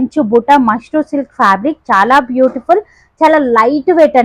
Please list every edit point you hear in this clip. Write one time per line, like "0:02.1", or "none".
none